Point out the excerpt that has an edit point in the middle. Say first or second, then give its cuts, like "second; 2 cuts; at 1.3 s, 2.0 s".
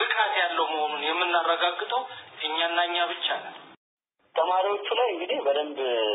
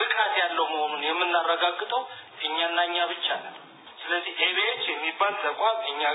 first; 1 cut; at 4.0 s